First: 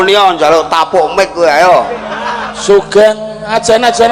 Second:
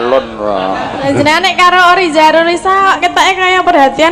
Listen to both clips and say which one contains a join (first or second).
second